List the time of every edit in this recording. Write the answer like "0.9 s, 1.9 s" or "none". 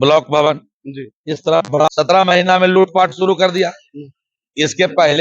1.9 s